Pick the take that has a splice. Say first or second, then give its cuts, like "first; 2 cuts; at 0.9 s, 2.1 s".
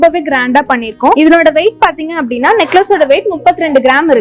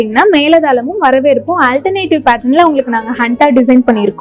first; 1 cut; at 1.2 s